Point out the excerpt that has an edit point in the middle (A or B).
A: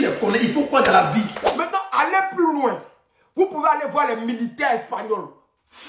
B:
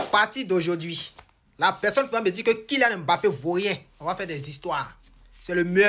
A